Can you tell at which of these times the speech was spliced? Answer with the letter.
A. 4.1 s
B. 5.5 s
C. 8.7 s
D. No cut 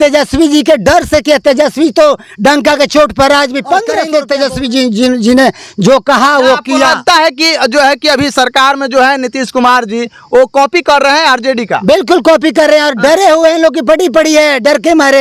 A